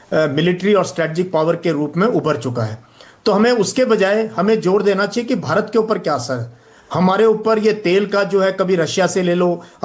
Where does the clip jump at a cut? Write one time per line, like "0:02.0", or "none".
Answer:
none

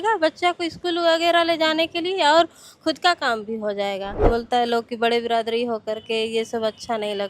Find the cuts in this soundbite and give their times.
0:04.3

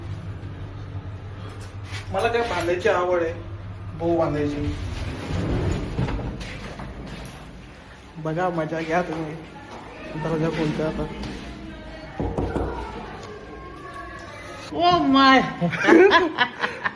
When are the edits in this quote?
0:14.6

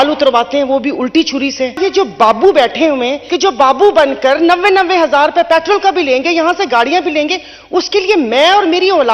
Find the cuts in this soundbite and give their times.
0:01.8
0:03.2

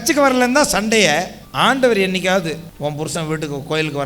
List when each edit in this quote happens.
0:01.4
0:02.7

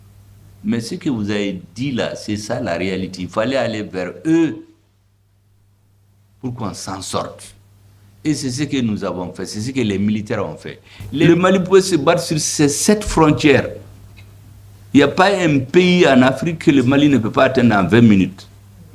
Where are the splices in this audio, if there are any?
0:11.2

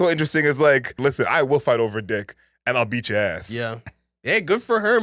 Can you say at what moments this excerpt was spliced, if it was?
0:01.0

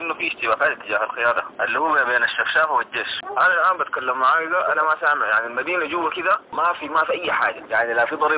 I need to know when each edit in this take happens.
0:01.5
0:03.2
0:06.5

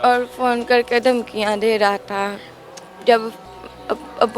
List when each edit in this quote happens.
none

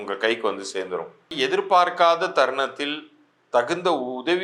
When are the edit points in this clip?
0:01.3

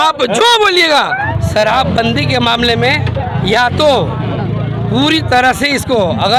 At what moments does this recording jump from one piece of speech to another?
0:01.2

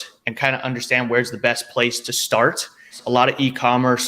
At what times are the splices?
0:03.0

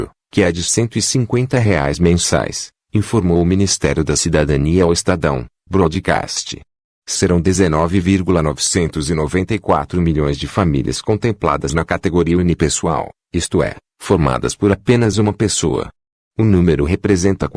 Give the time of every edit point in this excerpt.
none

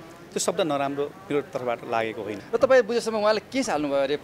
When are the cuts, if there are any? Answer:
0:02.4

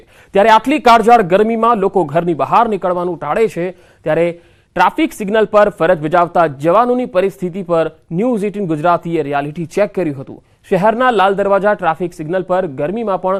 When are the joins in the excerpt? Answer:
none

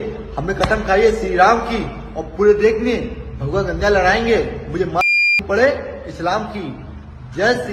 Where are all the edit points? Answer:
none

